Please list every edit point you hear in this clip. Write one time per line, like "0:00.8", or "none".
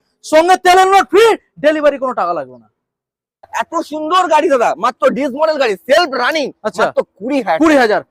0:03.5